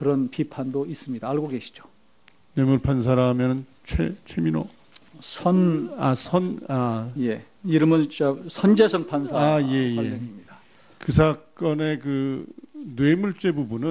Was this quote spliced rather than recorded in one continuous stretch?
no; 0 cuts

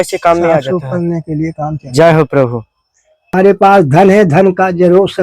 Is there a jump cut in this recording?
yes; 1 cut; at 3.3 s

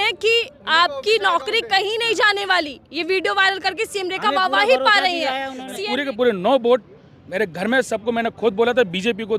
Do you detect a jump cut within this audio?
yes; 1 cut; at 5.8 s

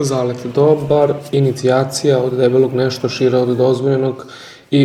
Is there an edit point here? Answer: no; 0 cuts

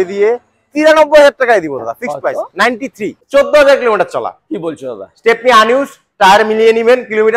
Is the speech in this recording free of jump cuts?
no; 1 cut; at 3.2 s

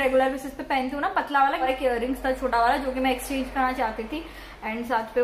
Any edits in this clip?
yes; 1 cut; at 1.7 s

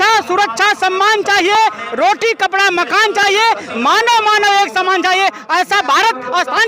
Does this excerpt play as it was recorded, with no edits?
yes; 0 cuts

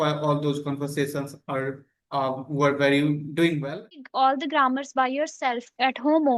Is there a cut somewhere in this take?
yes; 1 cut; at 4.0 s

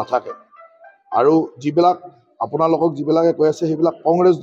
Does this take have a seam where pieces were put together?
no; 0 cuts

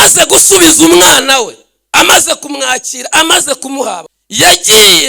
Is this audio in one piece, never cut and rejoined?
no; 1 cut; at 4.2 s

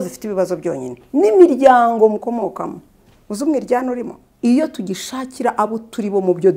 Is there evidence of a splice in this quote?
yes; 1 cut; at 4.2 s

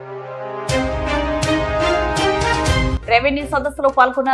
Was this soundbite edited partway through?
no; 0 cuts

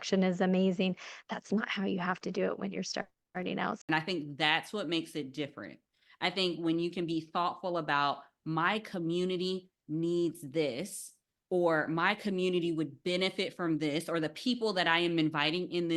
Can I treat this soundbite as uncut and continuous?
no; 1 cut; at 3.8 s

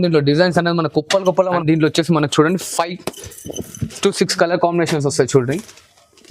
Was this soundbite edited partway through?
yes; 1 cut; at 1.6 s

